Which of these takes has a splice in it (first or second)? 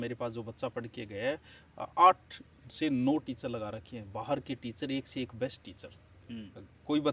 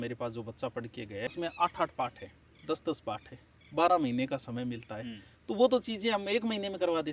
second